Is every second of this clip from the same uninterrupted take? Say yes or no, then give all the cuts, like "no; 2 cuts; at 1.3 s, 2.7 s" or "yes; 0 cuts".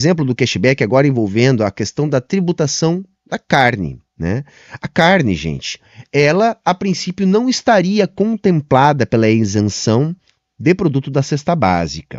yes; 0 cuts